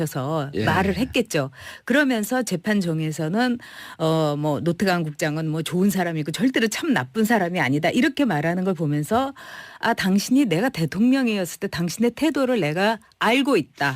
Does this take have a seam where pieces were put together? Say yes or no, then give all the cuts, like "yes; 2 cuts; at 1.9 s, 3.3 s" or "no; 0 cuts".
yes; 1 cut; at 0.9 s